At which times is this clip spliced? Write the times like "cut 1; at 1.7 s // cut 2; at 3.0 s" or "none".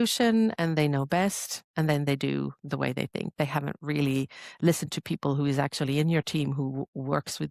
none